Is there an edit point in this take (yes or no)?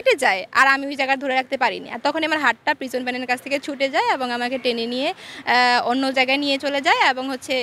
no